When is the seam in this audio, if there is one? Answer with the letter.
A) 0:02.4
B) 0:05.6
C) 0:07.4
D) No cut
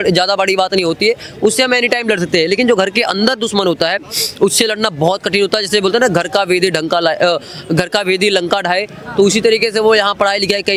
D